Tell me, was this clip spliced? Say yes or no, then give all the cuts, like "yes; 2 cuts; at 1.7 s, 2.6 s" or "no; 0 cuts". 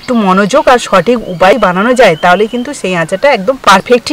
yes; 1 cut; at 1.5 s